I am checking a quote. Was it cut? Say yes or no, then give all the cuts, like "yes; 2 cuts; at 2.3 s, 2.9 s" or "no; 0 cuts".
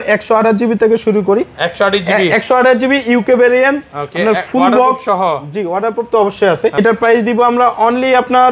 yes; 1 cut; at 6.8 s